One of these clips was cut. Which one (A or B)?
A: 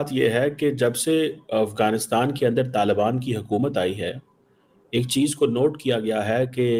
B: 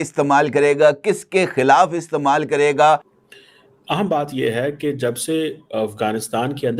B